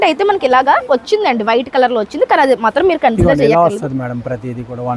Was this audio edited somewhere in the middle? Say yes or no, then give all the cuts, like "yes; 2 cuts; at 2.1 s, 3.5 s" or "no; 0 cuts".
no; 0 cuts